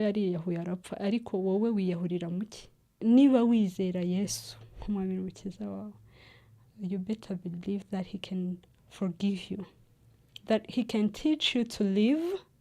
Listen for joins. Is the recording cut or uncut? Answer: cut